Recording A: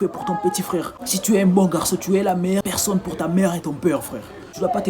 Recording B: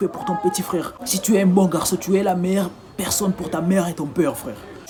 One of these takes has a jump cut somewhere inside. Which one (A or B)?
A